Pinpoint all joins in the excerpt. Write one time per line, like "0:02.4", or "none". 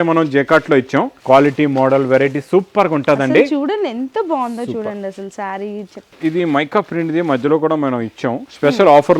0:01.2
0:06.1